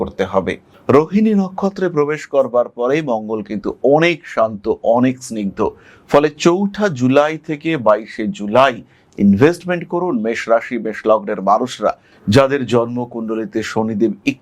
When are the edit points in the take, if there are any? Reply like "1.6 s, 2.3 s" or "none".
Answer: 12.1 s